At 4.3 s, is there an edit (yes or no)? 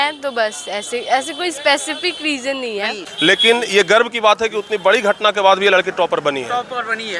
no